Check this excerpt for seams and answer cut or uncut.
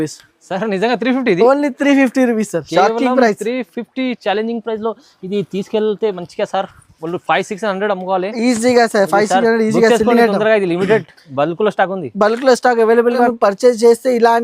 cut